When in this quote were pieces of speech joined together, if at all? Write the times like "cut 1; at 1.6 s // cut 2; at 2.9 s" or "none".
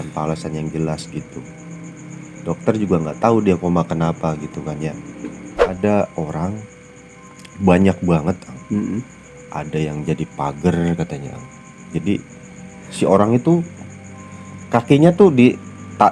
cut 1; at 5.7 s